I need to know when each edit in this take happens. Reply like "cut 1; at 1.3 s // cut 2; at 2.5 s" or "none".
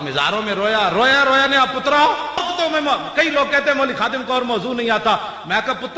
cut 1; at 2.4 s